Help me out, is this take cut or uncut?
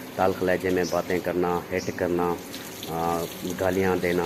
uncut